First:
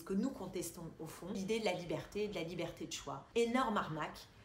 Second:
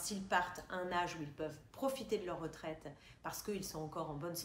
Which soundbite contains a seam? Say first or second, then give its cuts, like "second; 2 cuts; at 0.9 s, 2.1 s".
first; 2 cuts; at 1.4 s, 3.2 s